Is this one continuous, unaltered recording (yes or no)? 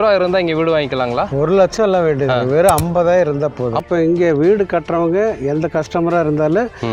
no